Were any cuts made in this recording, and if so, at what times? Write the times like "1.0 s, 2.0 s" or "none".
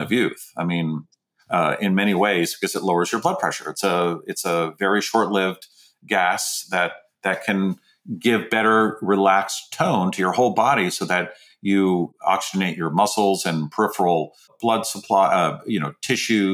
12.1 s, 14.5 s